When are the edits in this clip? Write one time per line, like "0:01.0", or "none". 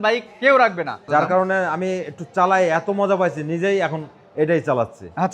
0:01.0